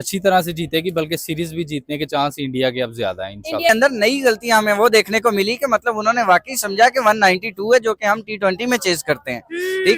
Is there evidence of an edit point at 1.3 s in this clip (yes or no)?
no